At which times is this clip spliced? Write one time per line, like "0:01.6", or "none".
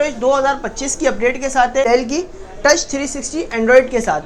0:01.8